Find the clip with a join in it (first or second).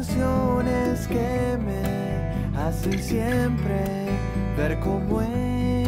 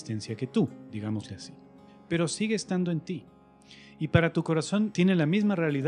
second